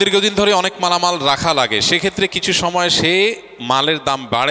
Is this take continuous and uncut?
yes; 0 cuts

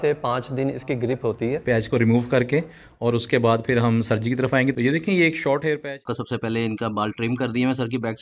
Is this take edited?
yes; 3 cuts; at 1.6 s, 4.8 s, 5.9 s

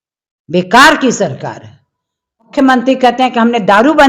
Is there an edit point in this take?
yes; 1 cut; at 2.5 s

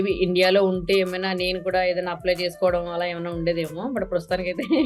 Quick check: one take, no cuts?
yes; 0 cuts

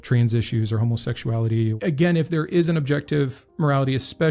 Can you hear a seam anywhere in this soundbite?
yes; 1 cut; at 1.8 s

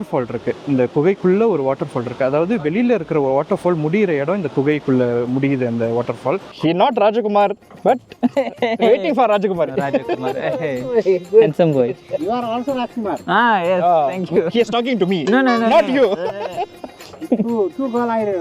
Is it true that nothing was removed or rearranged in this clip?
no; 2 cuts; at 6.5 s, 17.1 s

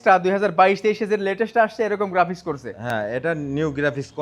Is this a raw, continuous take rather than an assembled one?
yes; 0 cuts

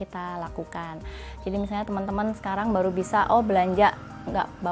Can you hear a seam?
no; 0 cuts

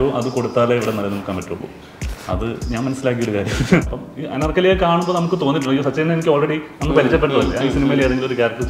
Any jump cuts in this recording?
yes; 1 cut; at 3.8 s

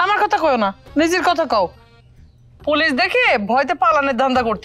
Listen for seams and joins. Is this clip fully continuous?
yes; 0 cuts

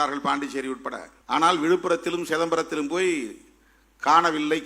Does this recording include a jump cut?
yes; 1 cut; at 1.1 s

